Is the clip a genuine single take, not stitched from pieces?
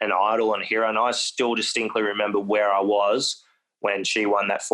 yes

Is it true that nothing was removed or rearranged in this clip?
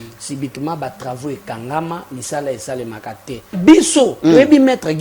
no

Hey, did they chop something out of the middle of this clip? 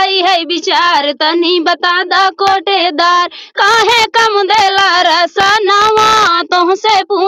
no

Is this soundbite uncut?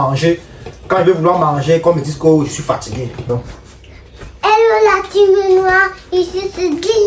no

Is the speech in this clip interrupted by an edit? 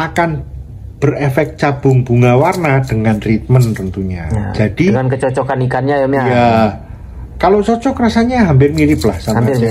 no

